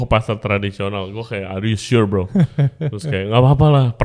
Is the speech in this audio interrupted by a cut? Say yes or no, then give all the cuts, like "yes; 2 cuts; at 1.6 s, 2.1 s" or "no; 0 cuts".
no; 0 cuts